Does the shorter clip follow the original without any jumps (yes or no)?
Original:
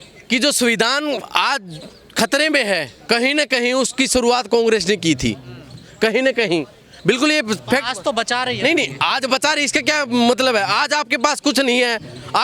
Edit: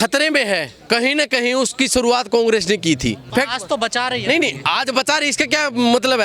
no